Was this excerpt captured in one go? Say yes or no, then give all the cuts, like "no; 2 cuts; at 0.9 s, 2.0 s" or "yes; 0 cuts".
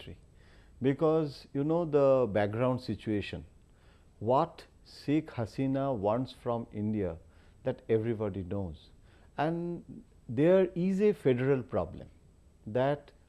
no; 1 cut; at 8.0 s